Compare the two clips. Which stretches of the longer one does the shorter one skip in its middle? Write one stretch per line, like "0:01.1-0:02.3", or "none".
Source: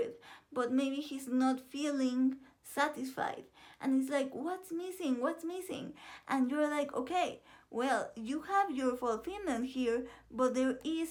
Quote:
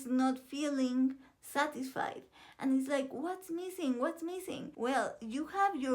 0:05.8-0:07.6